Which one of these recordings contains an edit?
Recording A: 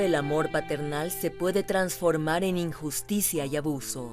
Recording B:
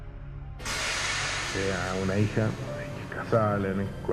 B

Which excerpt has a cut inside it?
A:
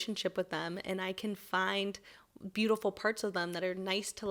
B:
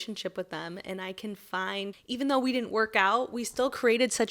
B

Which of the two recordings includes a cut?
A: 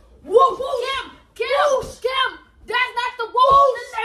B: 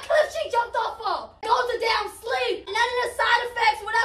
B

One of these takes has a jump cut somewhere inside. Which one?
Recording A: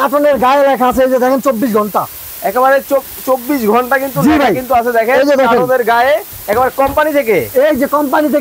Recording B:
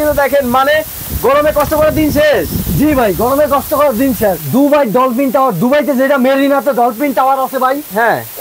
B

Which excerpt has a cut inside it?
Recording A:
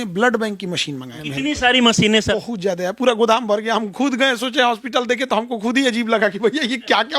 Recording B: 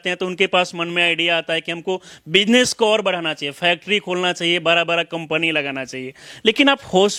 A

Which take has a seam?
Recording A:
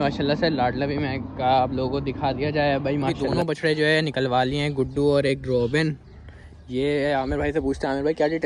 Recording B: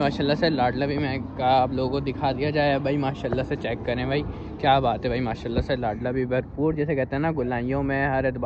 A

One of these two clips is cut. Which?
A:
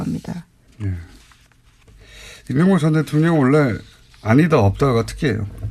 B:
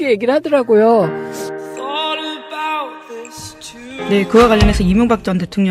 B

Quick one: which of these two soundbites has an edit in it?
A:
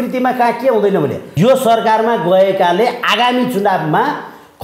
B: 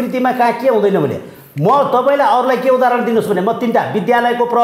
A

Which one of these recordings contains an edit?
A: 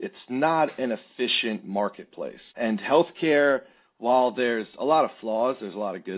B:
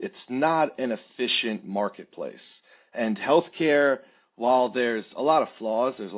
A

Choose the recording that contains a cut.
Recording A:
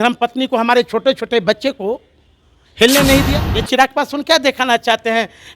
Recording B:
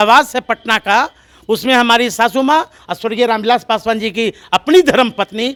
A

